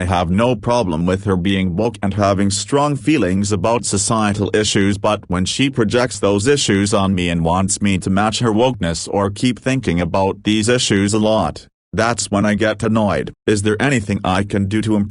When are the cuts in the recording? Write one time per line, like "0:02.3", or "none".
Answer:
0:13.3